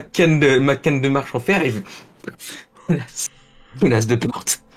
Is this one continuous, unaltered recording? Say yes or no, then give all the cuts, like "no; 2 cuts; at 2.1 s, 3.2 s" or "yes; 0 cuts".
yes; 0 cuts